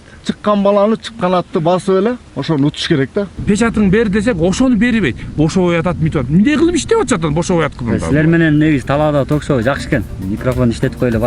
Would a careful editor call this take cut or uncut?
cut